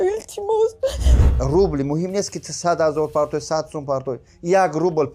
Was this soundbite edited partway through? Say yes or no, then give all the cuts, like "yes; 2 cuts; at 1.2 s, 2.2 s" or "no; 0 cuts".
yes; 1 cut; at 1.2 s